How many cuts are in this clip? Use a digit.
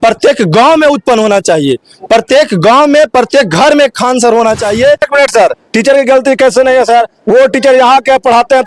1